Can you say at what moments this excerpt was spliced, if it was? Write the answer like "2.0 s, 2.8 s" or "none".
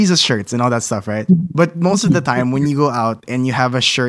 none